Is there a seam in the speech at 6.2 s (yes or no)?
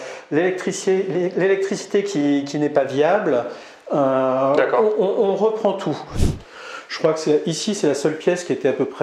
yes